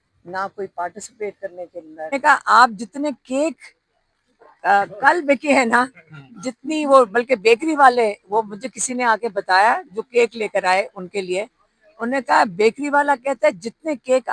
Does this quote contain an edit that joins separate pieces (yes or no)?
yes